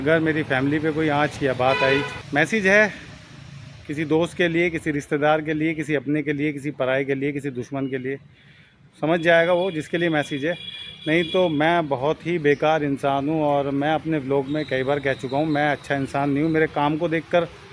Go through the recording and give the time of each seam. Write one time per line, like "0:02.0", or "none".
0:02.2